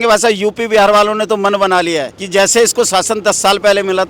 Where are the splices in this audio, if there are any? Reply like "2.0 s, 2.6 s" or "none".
2.2 s